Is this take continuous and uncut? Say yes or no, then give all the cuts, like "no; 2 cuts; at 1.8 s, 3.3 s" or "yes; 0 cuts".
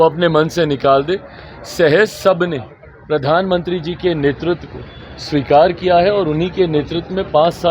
yes; 0 cuts